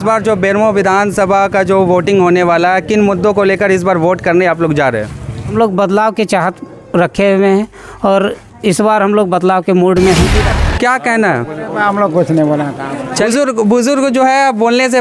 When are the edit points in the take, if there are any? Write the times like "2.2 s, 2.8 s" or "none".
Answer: 5.5 s, 10.5 s, 13.3 s